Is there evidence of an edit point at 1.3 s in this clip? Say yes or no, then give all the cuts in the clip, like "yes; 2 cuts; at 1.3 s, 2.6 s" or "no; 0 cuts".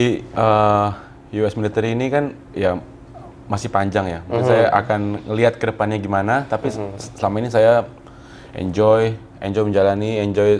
no; 0 cuts